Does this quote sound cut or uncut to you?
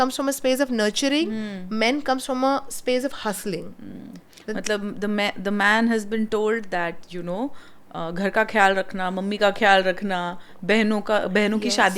uncut